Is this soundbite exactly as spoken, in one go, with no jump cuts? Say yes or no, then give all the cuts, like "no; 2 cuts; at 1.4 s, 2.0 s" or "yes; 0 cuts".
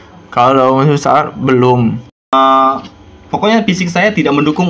no; 1 cut; at 2.3 s